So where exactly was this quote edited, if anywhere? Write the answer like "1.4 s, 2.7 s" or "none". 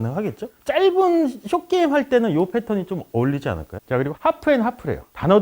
3.7 s